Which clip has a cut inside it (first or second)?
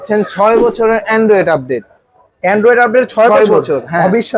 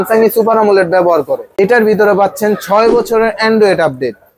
second